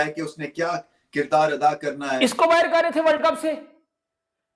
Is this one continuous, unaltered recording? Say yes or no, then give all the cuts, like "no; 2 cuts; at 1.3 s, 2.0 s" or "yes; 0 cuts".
no; 1 cut; at 2.1 s